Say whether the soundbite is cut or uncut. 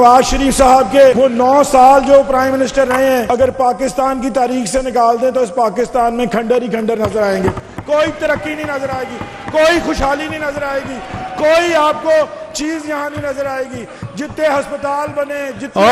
cut